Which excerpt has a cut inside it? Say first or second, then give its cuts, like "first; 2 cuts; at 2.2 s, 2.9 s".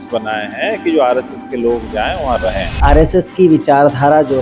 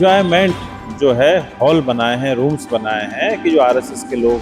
first; 1 cut; at 2.7 s